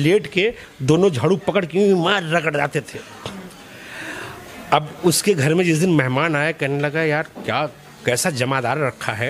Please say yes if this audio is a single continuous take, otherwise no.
yes